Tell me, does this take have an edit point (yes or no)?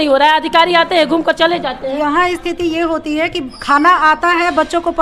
yes